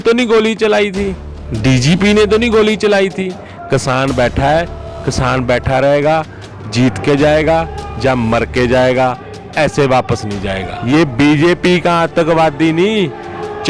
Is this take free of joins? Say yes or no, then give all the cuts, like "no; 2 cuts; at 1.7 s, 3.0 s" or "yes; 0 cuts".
no; 2 cuts; at 3.5 s, 10.7 s